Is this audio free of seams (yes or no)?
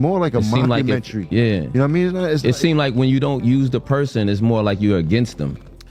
yes